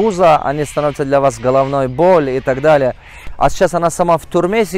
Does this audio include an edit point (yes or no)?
yes